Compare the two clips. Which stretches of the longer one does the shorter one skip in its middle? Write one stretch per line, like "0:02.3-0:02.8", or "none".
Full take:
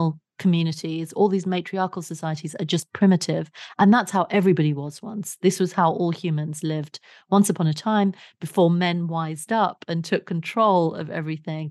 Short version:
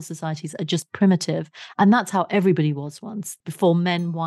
0:05.3-0:08.2